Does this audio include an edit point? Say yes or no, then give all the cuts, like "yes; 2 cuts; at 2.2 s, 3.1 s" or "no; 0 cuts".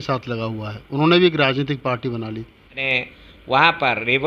yes; 1 cut; at 2.8 s